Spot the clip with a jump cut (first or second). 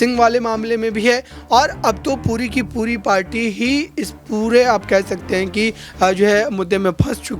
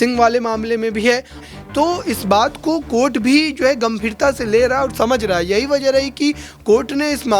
second